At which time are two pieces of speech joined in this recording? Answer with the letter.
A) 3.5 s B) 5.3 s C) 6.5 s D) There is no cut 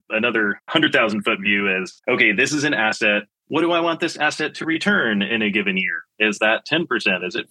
B